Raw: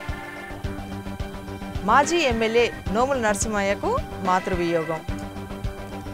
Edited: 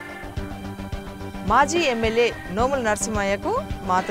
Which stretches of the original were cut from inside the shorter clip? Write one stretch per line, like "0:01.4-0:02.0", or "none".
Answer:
0:01.7-0:01.8